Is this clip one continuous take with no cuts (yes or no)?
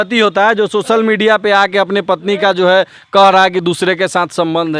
yes